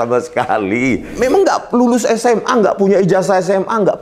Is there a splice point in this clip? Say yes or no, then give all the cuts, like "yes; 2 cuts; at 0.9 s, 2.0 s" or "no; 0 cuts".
yes; 1 cut; at 1.1 s